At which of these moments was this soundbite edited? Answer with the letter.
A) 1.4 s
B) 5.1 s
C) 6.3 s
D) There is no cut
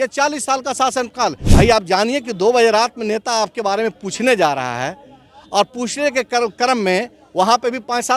A